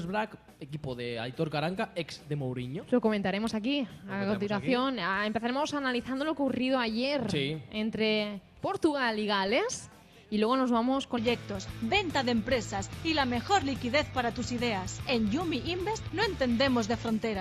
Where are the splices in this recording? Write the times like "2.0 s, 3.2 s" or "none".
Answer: none